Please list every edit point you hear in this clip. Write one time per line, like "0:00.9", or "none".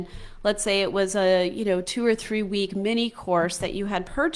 none